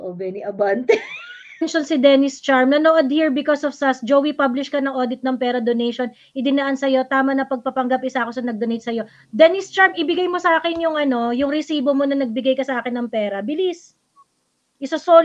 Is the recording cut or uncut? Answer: cut